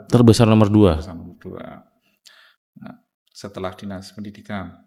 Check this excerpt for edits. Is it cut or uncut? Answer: uncut